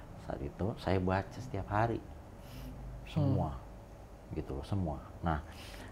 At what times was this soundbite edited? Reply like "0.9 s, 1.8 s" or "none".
none